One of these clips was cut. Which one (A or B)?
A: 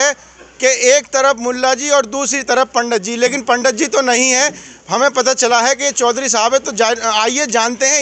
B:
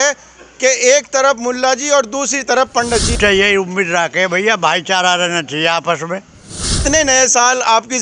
B